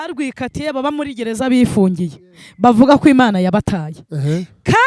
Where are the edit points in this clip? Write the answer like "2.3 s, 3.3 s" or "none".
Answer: none